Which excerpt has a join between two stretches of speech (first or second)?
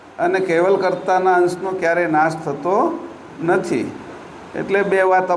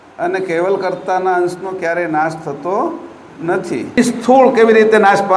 second